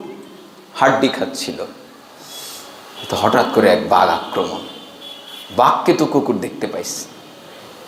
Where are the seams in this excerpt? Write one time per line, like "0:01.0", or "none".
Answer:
none